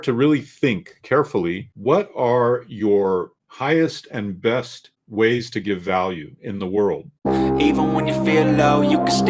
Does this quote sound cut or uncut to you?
cut